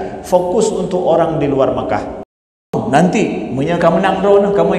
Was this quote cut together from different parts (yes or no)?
yes